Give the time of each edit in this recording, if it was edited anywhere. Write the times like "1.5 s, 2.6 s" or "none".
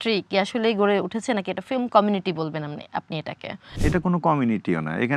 3.8 s